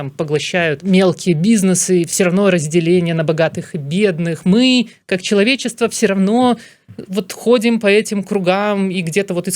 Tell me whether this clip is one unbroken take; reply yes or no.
no